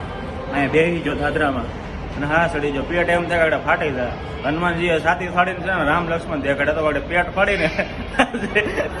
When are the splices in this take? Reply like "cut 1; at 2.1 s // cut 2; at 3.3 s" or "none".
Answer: none